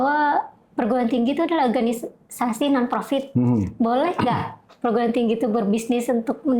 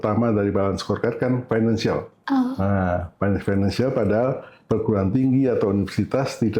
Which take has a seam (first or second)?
second